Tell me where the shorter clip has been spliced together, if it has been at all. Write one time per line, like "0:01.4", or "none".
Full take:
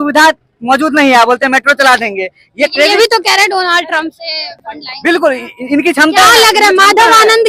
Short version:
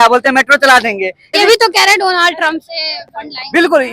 0:01.4